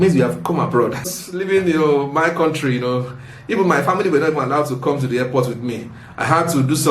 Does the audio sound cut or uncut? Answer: cut